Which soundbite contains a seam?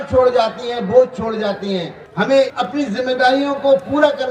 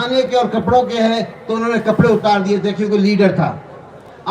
first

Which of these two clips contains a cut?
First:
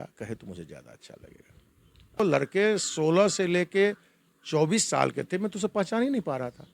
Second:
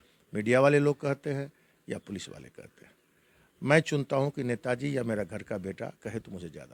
first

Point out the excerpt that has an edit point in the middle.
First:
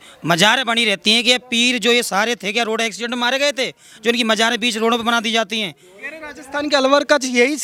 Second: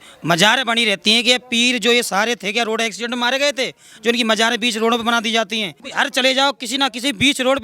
second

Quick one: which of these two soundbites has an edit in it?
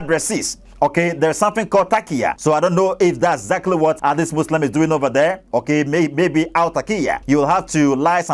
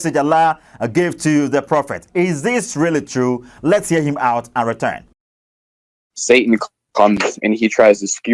first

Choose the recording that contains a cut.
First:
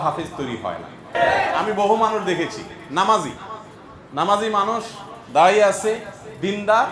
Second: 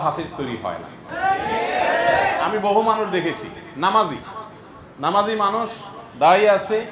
first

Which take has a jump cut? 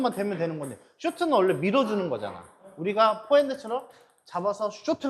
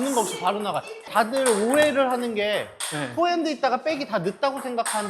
second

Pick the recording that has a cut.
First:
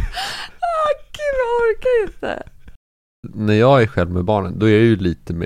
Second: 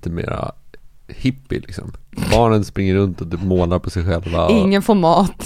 first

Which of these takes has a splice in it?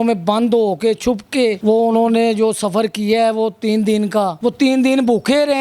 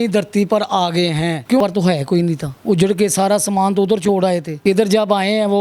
second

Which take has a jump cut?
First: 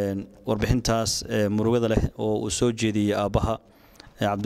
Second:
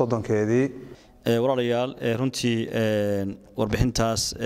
second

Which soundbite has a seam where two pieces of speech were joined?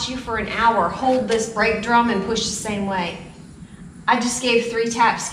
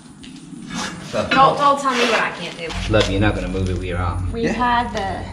second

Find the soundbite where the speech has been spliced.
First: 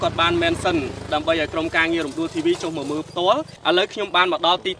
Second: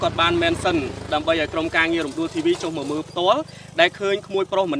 first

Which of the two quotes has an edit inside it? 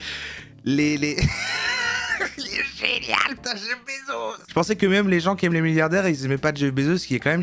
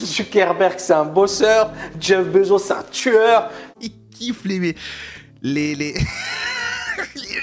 second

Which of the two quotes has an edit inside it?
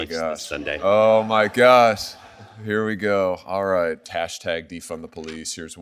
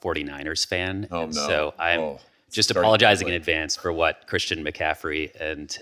first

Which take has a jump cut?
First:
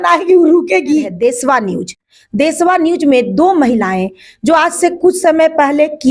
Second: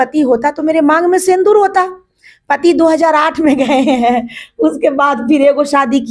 first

